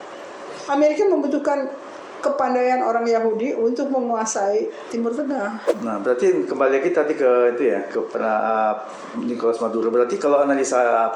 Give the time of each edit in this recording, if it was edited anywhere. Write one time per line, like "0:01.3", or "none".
0:05.7